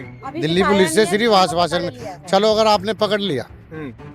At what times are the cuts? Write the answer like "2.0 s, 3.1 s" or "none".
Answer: none